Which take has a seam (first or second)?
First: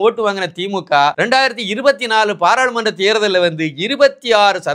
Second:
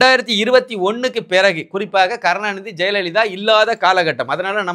first